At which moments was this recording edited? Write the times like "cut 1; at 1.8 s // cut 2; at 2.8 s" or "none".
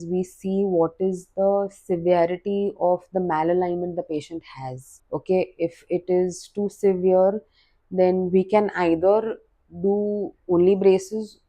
cut 1; at 4.9 s